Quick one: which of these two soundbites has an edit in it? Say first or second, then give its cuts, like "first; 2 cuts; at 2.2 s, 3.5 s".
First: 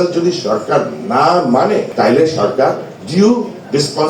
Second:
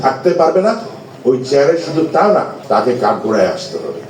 first; 1 cut; at 1.9 s